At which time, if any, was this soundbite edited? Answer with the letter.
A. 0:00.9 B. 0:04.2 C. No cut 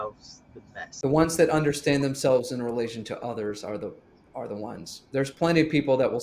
A